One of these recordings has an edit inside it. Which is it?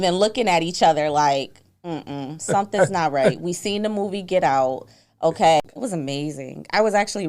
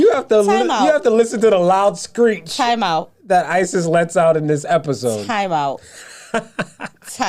first; 1 cut; at 5.6 s

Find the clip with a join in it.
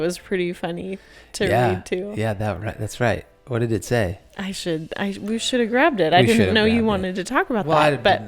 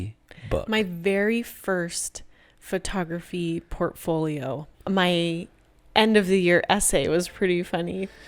second; 1 cut; at 4.7 s

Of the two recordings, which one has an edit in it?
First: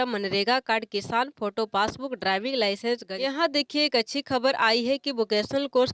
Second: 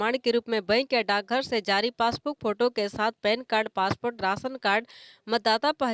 first; 1 cut; at 3.1 s

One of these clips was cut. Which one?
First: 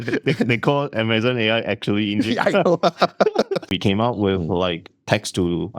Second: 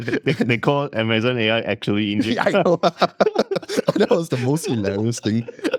first; 1 cut; at 3.7 s

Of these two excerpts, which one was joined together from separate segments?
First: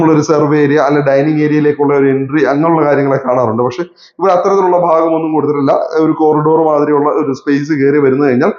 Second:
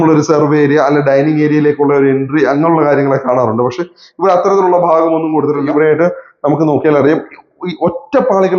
second; 1 cut; at 5.7 s

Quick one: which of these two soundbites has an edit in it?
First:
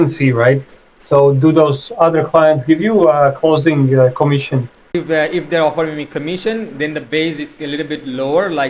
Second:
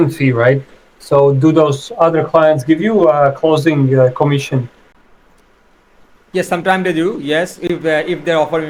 first; 1 cut; at 4.9 s

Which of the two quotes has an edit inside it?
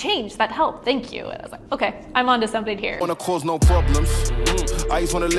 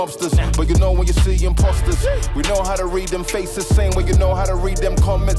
first; 1 cut; at 2.9 s

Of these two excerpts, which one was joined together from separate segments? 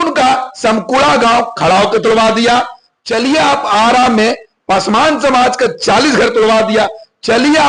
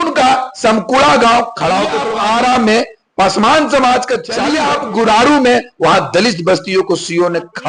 second; 2 cuts; at 2.0 s, 4.4 s

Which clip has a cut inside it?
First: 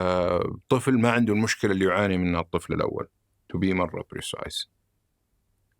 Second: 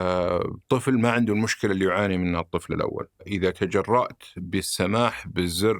second; 1 cut; at 3.3 s

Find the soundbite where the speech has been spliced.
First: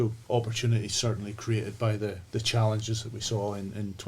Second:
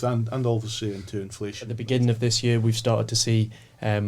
second; 1 cut; at 1.7 s

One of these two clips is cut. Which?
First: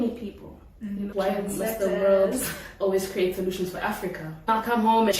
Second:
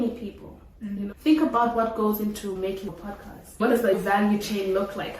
first; 2 cuts; at 1.1 s, 4.5 s

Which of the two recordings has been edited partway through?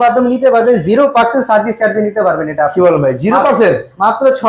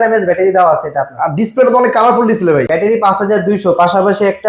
second; 1 cut; at 2.7 s

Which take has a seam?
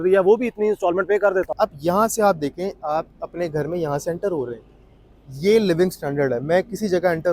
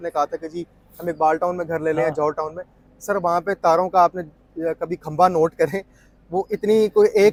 first; 1 cut; at 1.5 s

